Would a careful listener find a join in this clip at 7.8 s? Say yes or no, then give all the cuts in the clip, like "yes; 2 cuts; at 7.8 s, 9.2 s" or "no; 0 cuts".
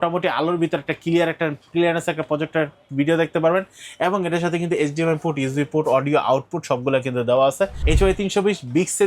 yes; 1 cut; at 7.8 s